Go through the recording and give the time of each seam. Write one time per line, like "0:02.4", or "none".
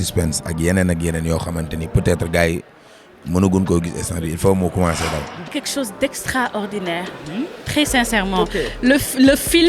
0:05.5